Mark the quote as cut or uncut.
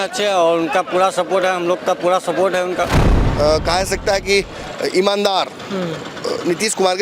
cut